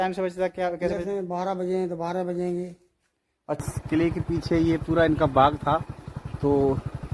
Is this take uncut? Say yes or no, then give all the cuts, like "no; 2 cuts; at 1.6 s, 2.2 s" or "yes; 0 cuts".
no; 1 cut; at 3.7 s